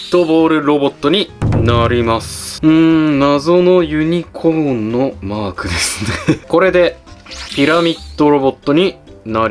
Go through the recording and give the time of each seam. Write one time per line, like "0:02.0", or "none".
0:02.4
0:06.4